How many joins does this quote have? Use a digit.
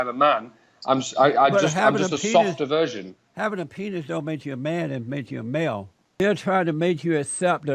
1